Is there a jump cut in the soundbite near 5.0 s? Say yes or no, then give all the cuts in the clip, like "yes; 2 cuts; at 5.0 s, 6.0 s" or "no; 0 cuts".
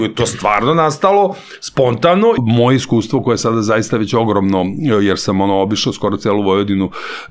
no; 1 cut; at 2.4 s